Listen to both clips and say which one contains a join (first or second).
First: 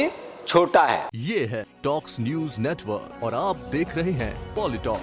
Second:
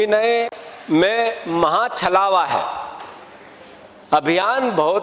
first